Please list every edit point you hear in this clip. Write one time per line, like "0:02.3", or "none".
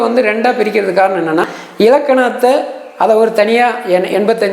0:01.6